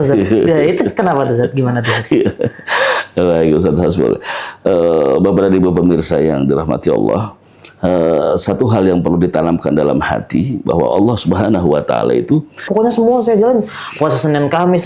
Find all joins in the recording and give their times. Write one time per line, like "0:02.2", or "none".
0:12.7